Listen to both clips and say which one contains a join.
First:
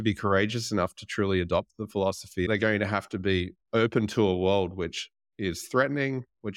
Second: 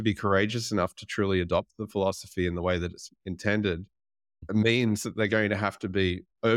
first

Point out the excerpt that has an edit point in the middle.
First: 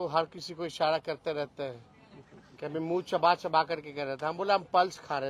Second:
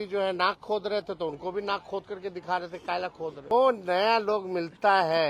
second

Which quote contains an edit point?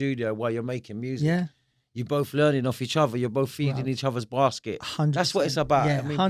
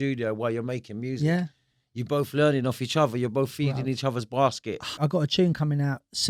second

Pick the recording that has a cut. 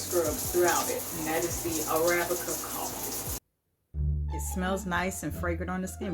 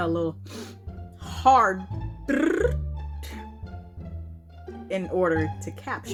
first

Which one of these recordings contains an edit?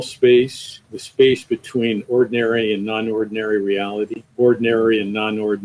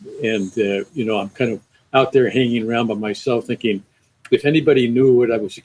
first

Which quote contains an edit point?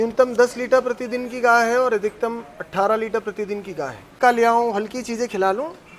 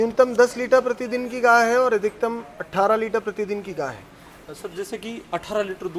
first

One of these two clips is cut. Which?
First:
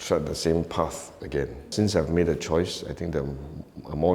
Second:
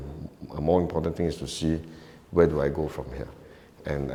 first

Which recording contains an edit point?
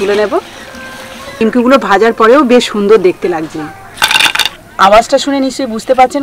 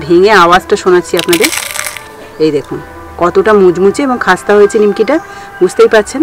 first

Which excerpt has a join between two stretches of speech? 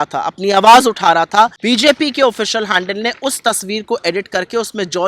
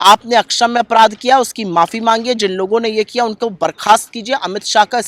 first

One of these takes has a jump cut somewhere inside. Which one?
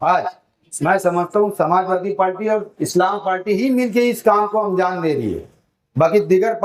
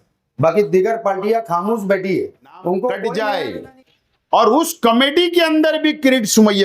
second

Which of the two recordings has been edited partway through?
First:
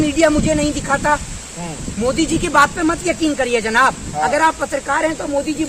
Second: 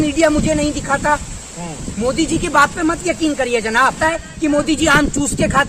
second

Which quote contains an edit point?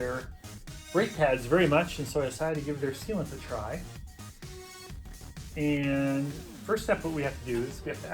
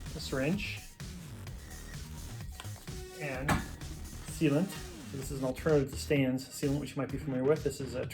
first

